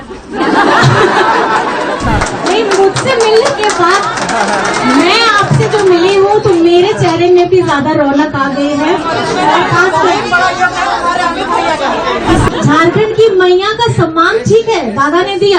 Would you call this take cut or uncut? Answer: cut